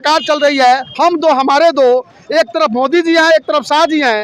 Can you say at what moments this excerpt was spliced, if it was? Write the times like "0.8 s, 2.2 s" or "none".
none